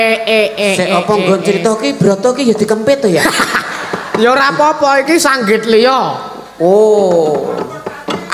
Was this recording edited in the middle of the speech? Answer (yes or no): no